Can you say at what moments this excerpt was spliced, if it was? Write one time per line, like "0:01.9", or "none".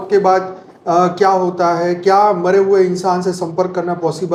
none

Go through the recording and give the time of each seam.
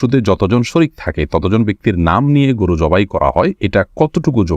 0:03.6

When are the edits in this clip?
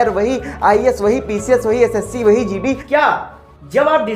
0:02.8

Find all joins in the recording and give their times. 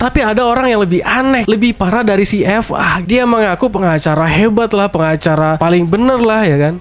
0:01.4
0:03.0
0:05.6

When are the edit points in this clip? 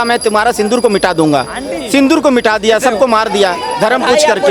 none

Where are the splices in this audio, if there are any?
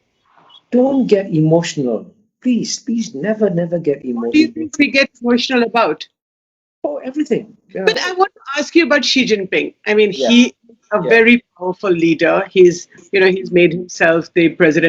0:07.9

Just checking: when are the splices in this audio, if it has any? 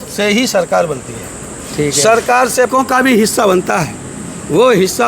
0:02.7

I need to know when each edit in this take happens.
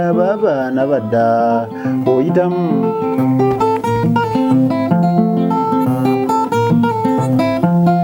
none

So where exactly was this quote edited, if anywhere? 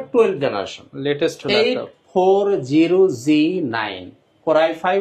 none

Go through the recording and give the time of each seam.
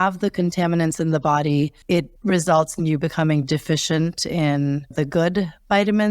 0:02.1
0:04.9

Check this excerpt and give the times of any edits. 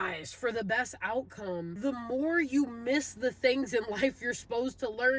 0:01.7

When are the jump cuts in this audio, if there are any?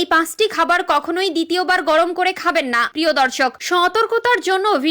0:02.9

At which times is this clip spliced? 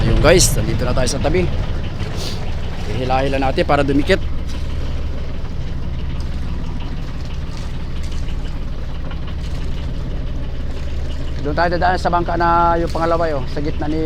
none

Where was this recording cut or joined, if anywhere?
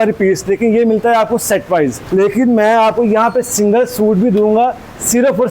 0:02.0

